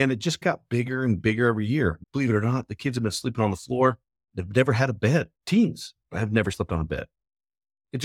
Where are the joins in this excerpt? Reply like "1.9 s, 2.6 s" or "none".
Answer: 2.0 s, 5.3 s, 6.5 s